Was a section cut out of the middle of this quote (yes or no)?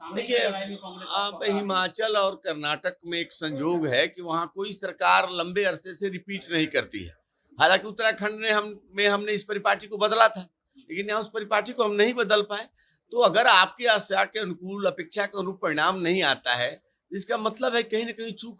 no